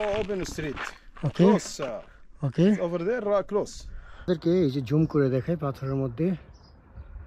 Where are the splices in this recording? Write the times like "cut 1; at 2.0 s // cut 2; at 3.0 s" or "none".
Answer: cut 1; at 4.3 s